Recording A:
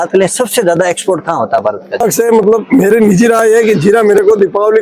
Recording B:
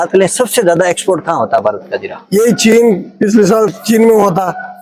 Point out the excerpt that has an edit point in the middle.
A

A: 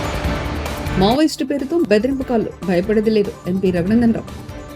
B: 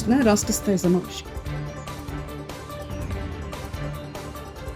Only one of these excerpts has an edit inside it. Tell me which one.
A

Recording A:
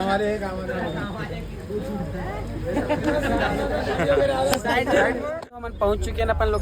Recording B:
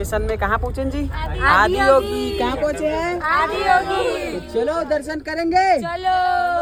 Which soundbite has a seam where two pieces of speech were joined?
A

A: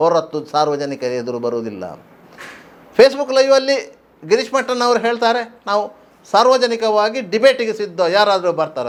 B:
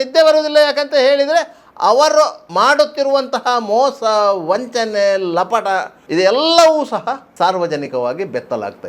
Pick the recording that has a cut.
B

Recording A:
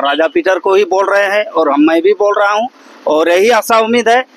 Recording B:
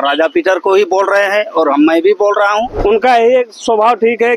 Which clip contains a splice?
B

